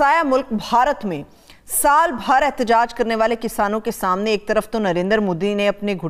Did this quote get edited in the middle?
no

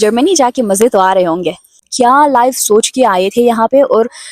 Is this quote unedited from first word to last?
no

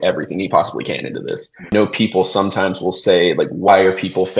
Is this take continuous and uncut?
no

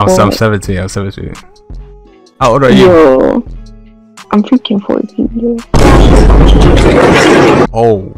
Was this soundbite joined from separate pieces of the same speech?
no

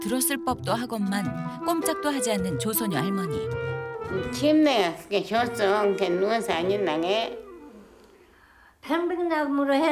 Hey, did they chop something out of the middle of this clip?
yes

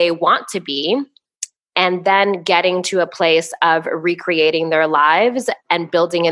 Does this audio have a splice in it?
no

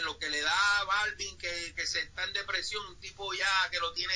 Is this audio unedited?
yes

